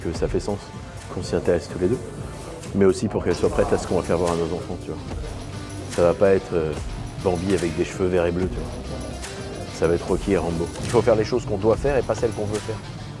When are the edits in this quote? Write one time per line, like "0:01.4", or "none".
0:10.8